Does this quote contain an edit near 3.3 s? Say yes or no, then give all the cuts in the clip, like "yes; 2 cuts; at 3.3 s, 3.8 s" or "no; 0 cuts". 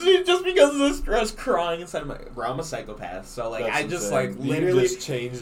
no; 0 cuts